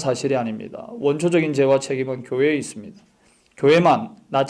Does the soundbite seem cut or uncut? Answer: cut